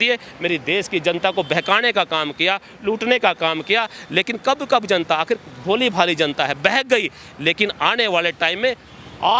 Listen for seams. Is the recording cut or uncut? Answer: uncut